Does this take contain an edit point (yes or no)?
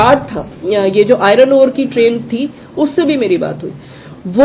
no